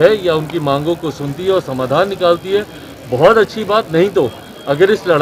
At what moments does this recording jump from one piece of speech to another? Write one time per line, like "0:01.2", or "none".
none